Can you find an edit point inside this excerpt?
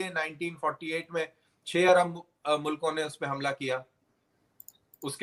no; 0 cuts

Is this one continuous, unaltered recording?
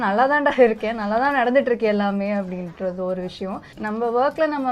no; 1 cut; at 3.7 s

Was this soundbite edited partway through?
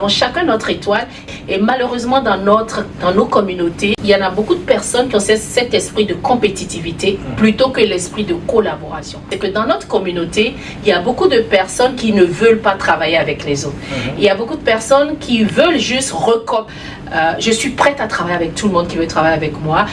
yes; 4 cuts; at 1.3 s, 4.0 s, 9.2 s, 16.7 s

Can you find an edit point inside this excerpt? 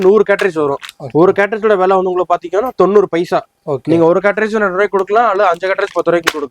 no; 0 cuts

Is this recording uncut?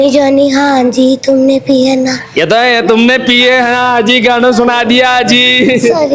yes; 0 cuts

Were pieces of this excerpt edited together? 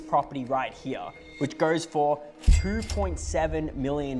no; 0 cuts

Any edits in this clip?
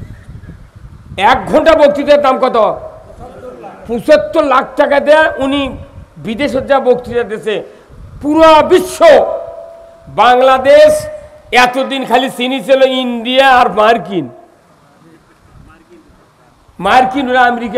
no; 0 cuts

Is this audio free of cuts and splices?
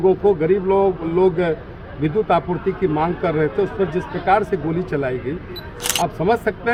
yes; 0 cuts

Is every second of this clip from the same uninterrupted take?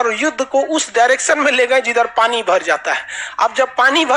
yes; 0 cuts

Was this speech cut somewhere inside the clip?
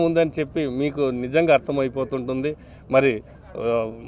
no; 0 cuts

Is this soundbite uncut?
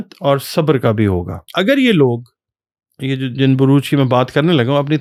yes; 0 cuts

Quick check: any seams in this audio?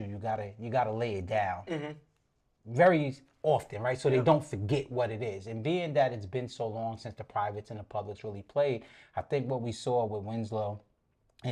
no; 0 cuts

